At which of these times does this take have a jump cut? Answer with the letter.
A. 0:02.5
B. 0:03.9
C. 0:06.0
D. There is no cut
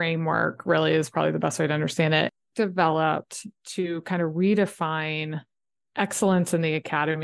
A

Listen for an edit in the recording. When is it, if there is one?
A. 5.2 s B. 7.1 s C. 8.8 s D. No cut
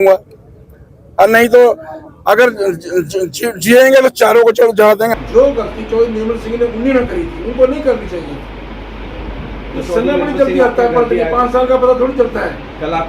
A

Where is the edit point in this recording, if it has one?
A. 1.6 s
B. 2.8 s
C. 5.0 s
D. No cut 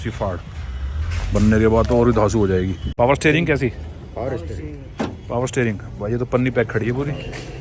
B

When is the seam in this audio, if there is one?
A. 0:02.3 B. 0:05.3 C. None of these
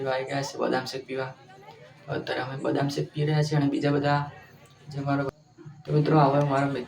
B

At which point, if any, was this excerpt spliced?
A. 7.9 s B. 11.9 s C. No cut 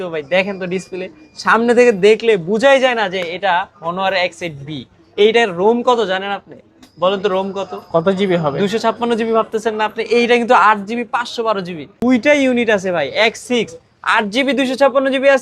B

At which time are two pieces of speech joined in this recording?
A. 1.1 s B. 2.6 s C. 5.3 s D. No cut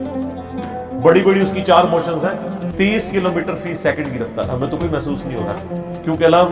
B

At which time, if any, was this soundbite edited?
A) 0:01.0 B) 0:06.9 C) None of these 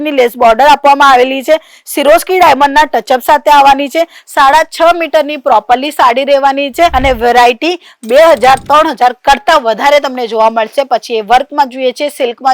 B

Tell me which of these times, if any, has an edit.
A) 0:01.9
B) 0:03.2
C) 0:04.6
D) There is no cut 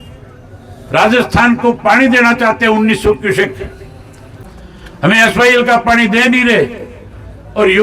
C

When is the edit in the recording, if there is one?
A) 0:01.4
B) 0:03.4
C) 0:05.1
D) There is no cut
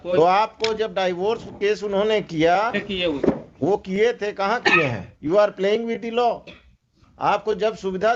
C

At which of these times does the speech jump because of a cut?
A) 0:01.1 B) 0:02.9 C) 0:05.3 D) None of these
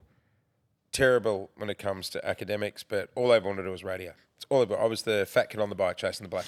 D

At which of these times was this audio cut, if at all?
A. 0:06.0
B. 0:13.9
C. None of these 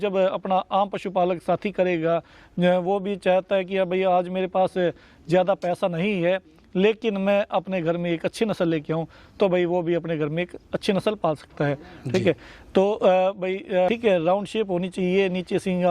B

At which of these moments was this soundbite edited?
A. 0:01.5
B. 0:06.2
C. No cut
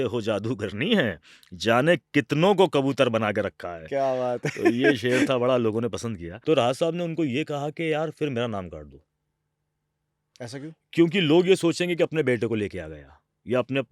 B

